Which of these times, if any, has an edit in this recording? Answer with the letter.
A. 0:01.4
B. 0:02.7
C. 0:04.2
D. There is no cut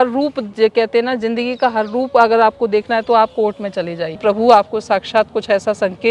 C